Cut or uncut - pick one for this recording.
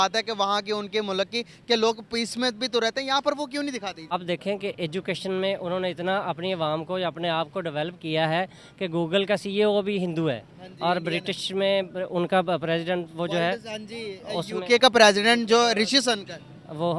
cut